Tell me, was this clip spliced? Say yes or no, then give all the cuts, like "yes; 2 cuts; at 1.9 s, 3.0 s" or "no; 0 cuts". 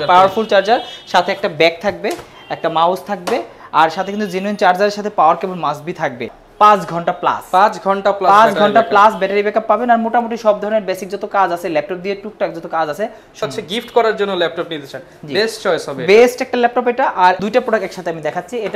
yes; 3 cuts; at 6.4 s, 13.4 s, 17.4 s